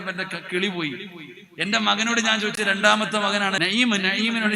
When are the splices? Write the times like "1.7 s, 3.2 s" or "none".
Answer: 3.6 s